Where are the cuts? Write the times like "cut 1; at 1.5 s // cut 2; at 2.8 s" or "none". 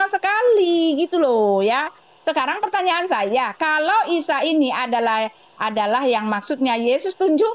none